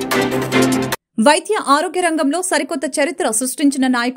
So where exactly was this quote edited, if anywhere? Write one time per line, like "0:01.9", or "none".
0:00.9